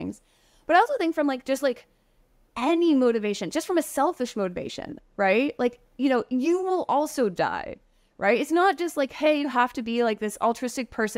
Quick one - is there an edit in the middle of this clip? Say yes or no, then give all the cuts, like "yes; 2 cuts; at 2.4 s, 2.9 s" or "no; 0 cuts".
no; 0 cuts